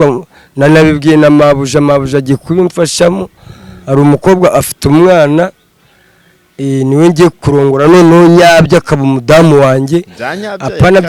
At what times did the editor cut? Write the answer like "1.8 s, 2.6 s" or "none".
none